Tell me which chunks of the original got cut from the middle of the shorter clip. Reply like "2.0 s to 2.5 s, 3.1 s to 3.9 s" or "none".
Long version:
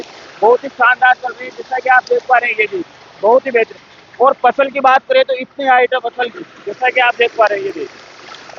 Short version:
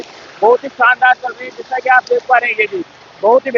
none